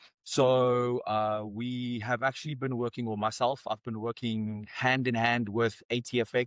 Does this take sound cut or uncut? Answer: uncut